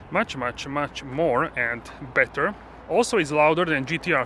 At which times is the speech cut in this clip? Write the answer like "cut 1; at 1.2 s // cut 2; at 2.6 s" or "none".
cut 1; at 2.7 s